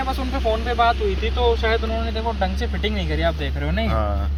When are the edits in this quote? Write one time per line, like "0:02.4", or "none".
none